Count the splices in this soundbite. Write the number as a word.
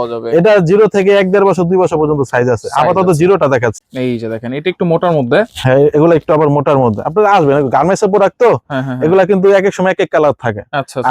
one